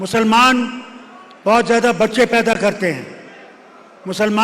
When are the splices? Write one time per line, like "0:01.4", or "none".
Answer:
none